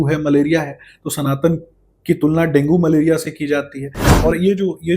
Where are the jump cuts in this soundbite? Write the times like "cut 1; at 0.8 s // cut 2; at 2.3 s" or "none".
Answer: cut 1; at 4.0 s